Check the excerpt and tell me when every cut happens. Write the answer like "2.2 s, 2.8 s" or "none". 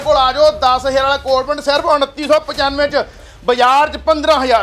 3.2 s